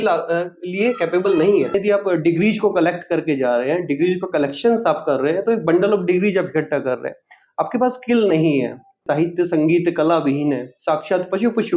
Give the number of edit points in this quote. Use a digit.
2